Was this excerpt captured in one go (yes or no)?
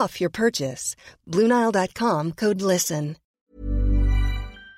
no